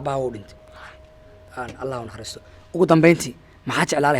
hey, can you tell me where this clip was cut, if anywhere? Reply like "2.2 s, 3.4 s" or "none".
none